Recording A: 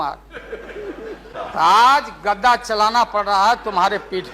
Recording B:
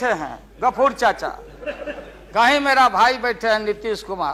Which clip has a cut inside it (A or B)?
A